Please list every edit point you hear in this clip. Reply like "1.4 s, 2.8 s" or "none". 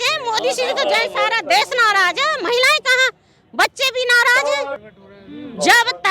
4.9 s